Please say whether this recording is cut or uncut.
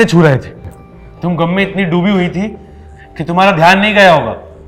uncut